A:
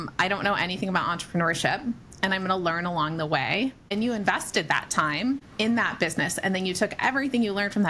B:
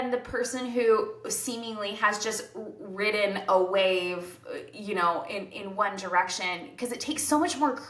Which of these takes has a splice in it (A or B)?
A